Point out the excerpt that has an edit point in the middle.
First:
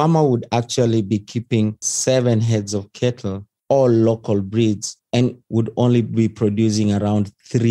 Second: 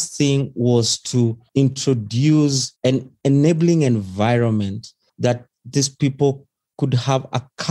first; 2 cuts; at 1.9 s, 5.4 s

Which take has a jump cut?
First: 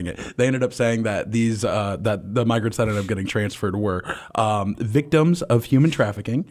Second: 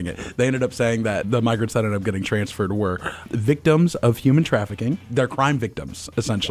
second; 3 cuts; at 1.2 s, 3.3 s, 5.0 s

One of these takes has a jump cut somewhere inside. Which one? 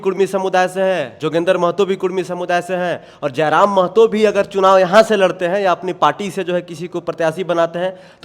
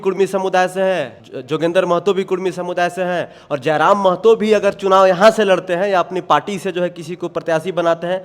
first; 1 cut; at 1.1 s

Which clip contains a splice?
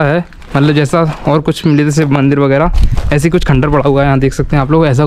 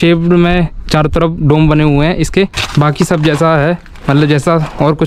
second; 1 cut; at 2.6 s

